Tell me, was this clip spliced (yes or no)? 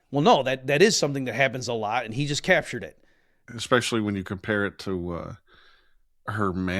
yes